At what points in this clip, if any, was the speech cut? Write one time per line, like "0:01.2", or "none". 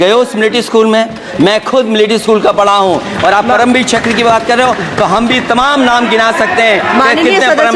none

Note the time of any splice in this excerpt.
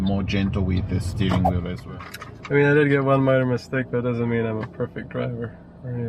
0:01.8

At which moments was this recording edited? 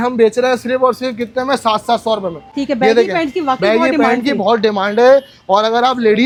none

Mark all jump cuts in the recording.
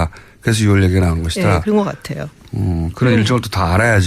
0:01.9

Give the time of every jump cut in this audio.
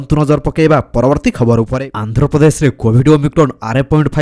none

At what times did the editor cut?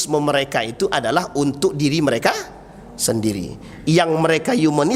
none

